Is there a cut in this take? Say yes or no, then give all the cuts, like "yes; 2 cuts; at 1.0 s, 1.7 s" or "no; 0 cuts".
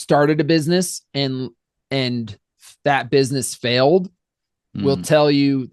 no; 0 cuts